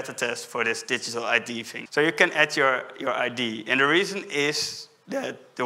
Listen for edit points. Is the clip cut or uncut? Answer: cut